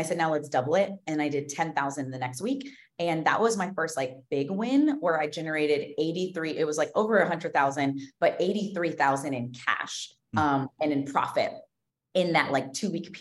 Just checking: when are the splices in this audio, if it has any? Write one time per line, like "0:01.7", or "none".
none